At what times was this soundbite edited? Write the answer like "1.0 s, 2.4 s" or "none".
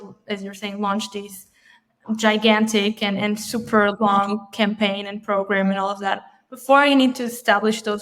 none